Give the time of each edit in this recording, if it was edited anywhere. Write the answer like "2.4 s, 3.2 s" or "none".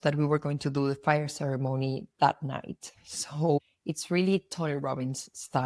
none